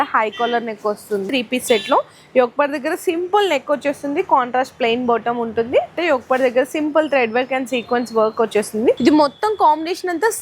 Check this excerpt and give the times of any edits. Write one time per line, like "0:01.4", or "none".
0:01.3
0:06.0
0:09.0